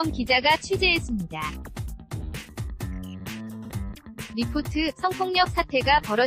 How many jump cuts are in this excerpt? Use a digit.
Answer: 2